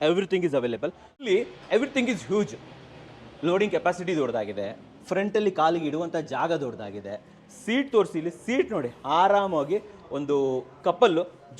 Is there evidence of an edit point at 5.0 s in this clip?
no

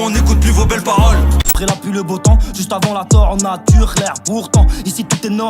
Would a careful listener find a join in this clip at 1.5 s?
yes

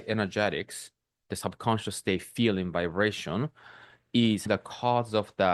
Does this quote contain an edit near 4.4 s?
yes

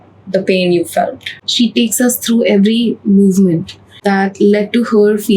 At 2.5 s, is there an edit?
no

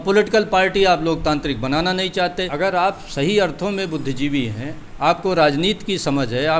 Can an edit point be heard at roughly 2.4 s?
yes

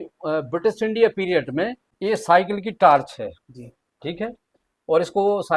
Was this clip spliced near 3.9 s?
no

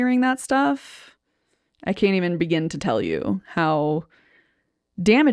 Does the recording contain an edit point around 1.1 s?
no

